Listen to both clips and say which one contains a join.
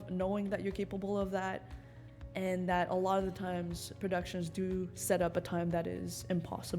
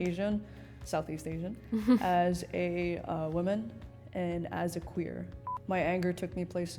second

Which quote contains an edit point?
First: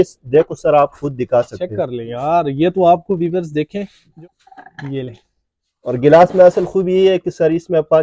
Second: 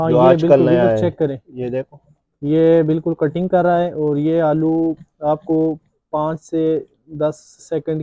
first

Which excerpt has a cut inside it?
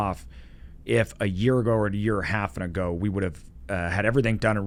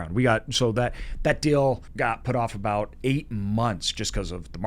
second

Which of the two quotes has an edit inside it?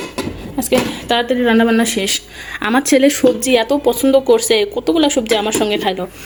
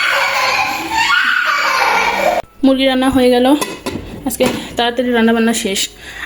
second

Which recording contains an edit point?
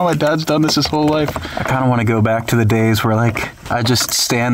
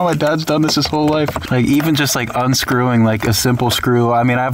first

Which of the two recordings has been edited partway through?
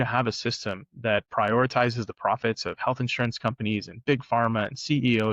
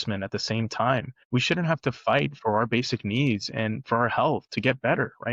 second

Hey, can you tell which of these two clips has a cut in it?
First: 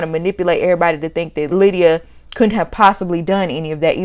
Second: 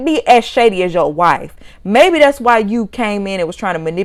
first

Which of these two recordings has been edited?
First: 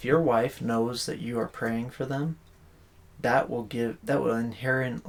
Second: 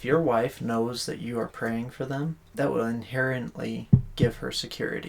second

